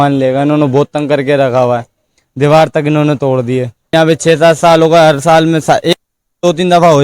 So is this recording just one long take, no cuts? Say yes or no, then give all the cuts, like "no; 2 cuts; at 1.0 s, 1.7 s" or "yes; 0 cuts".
no; 1 cut; at 3.9 s